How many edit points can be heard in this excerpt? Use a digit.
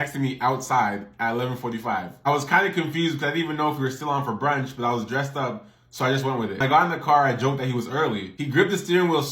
1